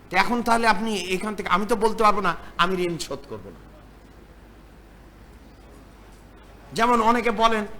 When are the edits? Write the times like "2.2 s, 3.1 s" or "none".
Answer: none